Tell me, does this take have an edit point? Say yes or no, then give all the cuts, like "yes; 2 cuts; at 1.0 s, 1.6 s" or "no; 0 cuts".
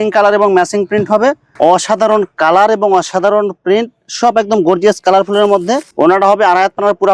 yes; 2 cuts; at 1.5 s, 5.9 s